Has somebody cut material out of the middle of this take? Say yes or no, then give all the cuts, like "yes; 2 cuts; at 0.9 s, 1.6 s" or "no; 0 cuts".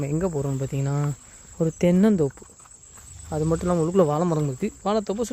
no; 0 cuts